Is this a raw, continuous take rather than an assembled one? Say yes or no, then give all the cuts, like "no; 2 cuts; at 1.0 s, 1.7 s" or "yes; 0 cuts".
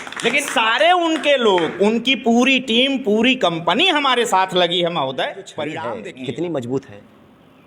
no; 1 cut; at 5.9 s